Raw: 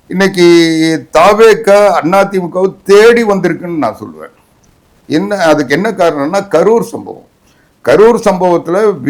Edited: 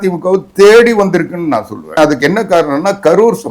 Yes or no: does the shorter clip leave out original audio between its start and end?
yes